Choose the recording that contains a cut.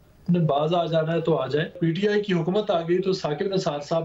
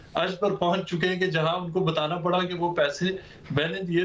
first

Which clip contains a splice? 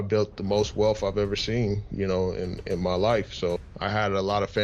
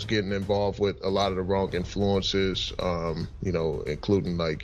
first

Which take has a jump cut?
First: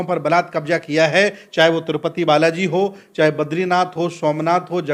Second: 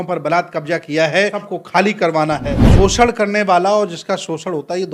second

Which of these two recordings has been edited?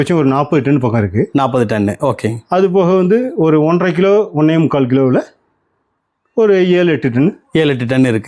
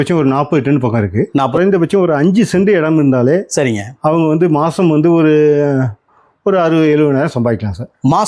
second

